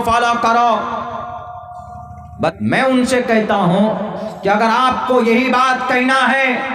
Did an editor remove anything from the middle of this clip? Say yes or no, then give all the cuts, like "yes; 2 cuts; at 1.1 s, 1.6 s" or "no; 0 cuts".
yes; 1 cut; at 2.5 s